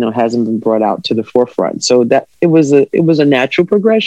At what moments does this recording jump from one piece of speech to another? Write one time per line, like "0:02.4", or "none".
none